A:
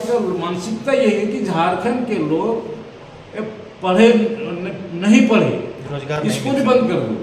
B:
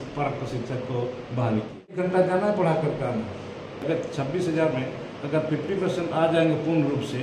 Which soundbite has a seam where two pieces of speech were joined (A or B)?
B